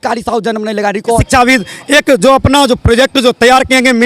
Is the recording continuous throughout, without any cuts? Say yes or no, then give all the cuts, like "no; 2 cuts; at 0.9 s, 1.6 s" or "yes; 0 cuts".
no; 1 cut; at 1.2 s